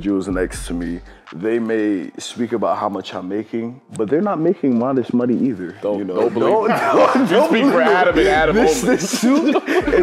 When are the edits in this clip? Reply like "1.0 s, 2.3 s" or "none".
3.8 s